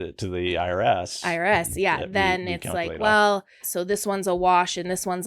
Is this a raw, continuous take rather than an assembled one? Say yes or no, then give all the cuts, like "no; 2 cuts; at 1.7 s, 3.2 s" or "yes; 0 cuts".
no; 1 cut; at 3.6 s